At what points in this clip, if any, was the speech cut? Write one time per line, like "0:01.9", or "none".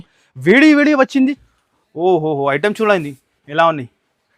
0:01.4